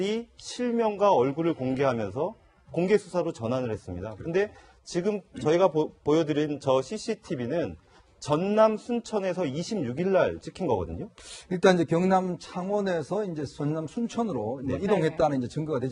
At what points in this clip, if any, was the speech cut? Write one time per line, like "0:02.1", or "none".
0:14.2